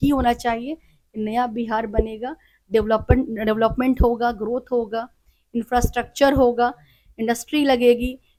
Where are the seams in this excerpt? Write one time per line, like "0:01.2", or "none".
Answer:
none